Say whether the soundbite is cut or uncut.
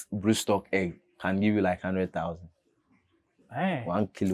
uncut